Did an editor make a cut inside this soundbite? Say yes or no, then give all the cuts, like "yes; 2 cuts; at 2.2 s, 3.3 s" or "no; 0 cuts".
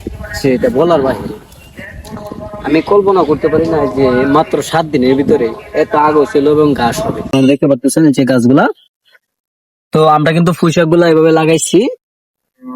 yes; 1 cut; at 7.3 s